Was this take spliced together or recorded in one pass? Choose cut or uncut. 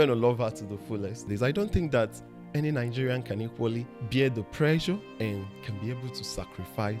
cut